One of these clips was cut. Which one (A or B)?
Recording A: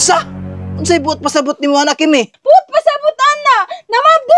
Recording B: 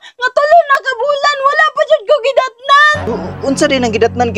A